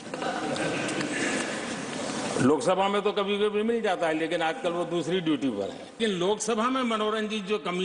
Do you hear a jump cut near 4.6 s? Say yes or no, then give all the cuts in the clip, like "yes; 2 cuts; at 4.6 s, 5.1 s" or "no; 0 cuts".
no; 1 cut; at 6.0 s